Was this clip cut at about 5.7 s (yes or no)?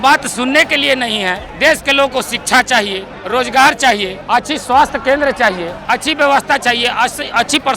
yes